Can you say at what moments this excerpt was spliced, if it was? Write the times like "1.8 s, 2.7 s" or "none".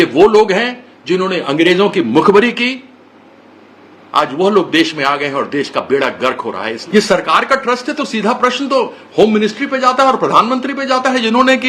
6.7 s